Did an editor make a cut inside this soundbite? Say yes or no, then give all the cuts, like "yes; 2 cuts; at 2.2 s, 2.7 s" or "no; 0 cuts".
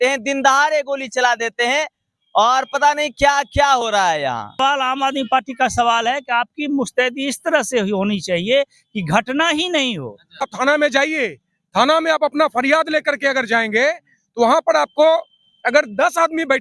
yes; 2 cuts; at 4.6 s, 10.5 s